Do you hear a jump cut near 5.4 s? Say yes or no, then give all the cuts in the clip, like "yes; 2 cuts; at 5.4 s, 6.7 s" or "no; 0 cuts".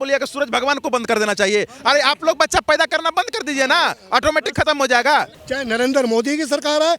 yes; 1 cut; at 5.4 s